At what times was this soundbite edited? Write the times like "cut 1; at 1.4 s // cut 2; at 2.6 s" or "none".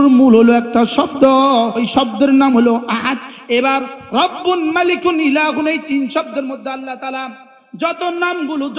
cut 1; at 1.8 s // cut 2; at 3.3 s